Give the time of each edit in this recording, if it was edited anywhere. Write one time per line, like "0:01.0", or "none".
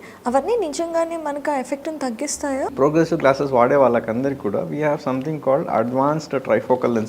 0:02.7